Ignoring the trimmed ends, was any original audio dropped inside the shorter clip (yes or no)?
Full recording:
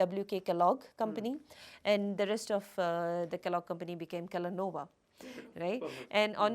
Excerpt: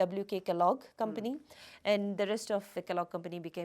yes